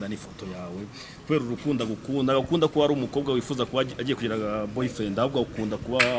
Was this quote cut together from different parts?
no; 0 cuts

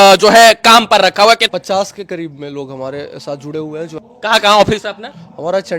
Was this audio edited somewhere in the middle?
yes; 2 cuts; at 1.5 s, 4.0 s

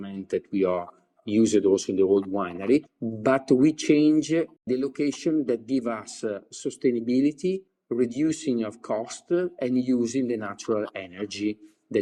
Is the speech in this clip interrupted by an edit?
no; 0 cuts

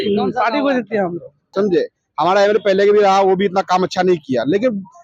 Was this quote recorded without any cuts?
no; 1 cut; at 1.3 s

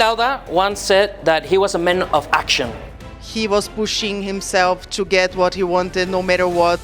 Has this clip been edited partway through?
yes; 1 cut; at 3.2 s

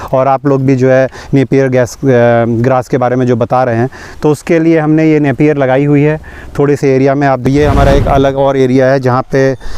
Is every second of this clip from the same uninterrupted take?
no; 1 cut; at 7.5 s

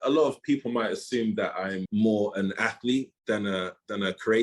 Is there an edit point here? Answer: yes; 1 cut; at 1.8 s

